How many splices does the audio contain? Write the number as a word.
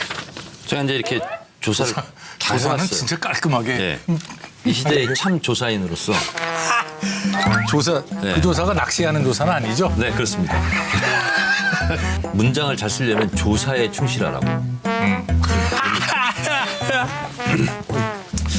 zero